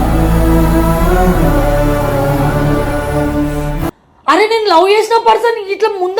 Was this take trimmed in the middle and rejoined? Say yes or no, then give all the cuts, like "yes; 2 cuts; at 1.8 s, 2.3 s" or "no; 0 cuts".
yes; 1 cut; at 3.8 s